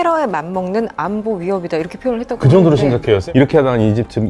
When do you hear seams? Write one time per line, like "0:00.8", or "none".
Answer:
0:03.2